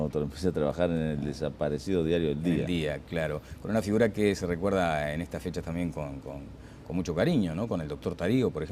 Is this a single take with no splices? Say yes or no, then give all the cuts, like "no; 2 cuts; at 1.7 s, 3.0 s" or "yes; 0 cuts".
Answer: no; 1 cut; at 6.5 s